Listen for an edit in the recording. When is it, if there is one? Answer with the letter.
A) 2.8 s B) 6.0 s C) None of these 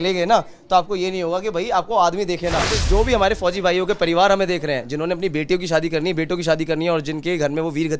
A